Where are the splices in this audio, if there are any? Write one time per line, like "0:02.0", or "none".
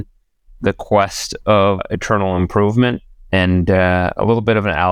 0:01.8